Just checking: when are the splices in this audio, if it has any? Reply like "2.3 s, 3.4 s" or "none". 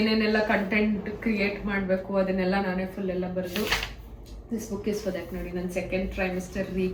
none